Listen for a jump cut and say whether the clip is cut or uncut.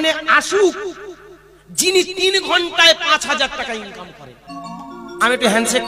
uncut